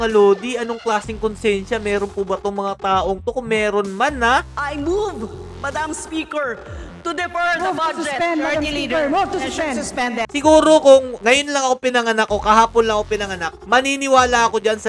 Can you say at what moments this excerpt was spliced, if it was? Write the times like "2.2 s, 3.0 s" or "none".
4.5 s, 10.3 s